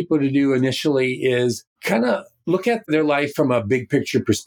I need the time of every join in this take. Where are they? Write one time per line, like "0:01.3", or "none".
0:01.7

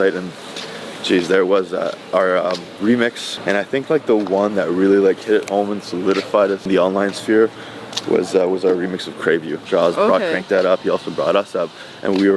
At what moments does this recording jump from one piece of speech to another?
0:03.3
0:09.6

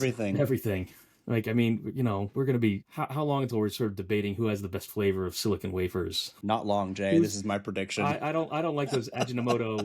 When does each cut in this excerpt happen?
0:02.9
0:06.3

